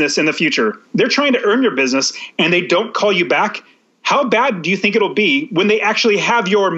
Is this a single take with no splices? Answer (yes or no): yes